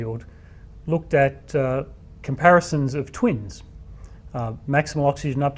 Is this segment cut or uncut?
uncut